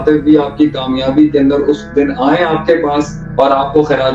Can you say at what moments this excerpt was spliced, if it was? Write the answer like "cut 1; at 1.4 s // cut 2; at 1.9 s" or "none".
cut 1; at 3.2 s